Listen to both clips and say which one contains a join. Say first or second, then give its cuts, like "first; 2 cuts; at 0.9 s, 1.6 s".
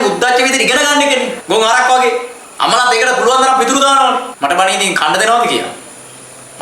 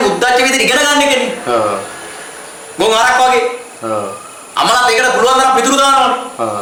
first; 3 cuts; at 1.4 s, 2.4 s, 4.3 s